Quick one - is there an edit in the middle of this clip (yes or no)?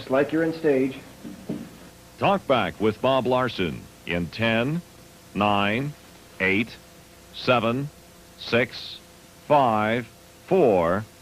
yes